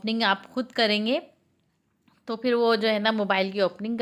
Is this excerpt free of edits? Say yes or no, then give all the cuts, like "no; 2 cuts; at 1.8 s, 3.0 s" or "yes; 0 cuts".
yes; 0 cuts